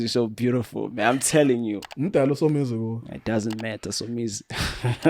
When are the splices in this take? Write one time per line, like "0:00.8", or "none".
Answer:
0:01.9